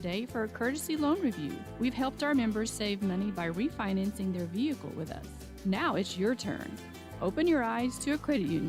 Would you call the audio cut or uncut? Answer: uncut